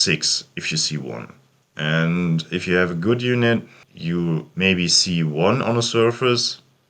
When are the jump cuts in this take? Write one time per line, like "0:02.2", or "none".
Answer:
none